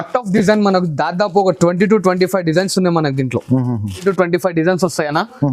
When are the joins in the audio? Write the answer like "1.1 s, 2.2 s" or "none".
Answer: 4.0 s